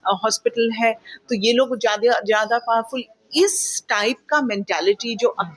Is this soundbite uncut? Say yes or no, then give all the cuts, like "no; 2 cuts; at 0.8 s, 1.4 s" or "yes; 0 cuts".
yes; 0 cuts